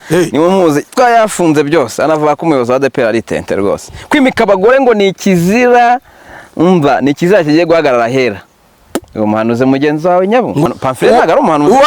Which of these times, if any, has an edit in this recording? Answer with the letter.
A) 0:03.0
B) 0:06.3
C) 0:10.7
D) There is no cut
C